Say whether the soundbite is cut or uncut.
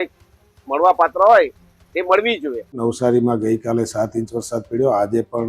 cut